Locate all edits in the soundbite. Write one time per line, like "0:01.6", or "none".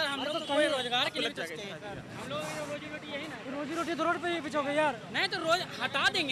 none